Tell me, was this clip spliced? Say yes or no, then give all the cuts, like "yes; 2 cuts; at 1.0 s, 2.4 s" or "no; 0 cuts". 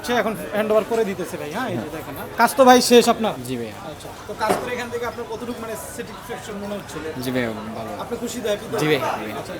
yes; 2 cuts; at 2.2 s, 3.4 s